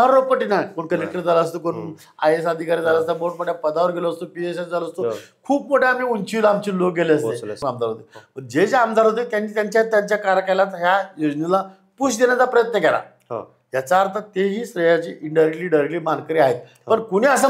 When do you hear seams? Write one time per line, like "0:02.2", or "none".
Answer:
0:07.6